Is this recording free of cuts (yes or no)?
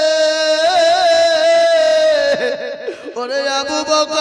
yes